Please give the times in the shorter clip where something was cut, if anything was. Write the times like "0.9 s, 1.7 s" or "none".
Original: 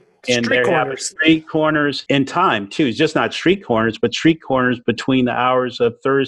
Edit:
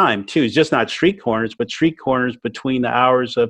none